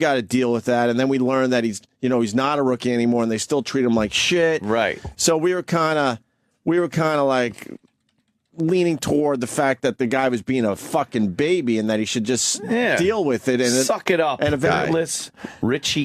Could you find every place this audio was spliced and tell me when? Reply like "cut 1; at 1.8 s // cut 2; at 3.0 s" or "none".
none